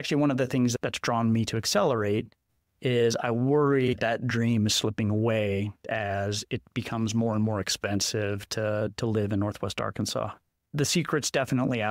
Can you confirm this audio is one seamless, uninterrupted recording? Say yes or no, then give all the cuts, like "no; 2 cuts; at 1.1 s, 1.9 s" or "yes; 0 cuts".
yes; 0 cuts